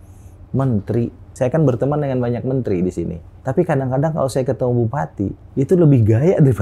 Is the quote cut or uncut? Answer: cut